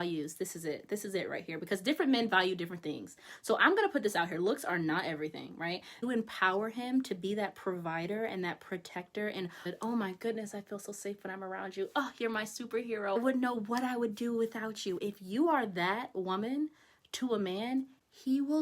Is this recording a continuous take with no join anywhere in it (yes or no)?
no